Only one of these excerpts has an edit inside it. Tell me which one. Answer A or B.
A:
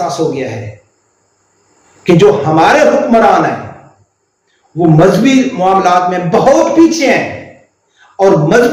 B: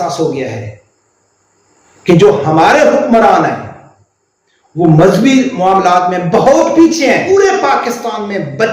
B